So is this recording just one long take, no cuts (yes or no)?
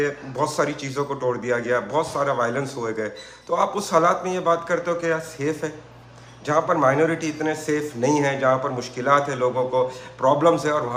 yes